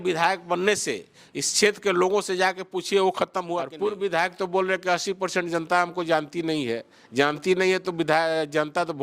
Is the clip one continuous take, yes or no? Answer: no